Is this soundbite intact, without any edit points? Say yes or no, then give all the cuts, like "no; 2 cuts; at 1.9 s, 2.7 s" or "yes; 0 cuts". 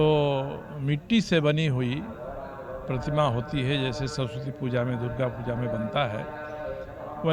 yes; 0 cuts